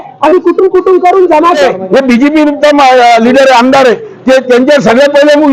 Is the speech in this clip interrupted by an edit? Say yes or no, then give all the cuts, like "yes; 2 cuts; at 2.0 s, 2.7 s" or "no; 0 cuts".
yes; 1 cut; at 1.6 s